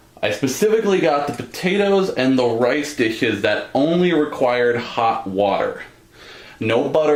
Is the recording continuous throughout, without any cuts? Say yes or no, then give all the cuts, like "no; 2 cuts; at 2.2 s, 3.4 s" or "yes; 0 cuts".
yes; 0 cuts